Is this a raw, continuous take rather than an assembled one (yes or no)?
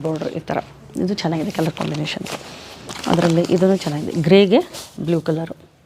yes